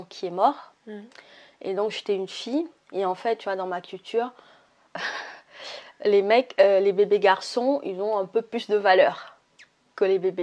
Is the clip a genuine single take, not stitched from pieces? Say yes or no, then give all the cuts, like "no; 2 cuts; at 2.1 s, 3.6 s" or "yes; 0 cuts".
yes; 0 cuts